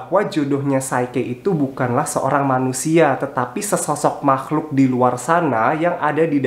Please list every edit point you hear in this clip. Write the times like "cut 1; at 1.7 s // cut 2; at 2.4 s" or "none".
none